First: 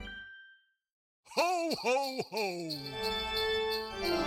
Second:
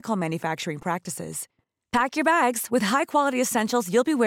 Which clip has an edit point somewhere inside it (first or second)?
first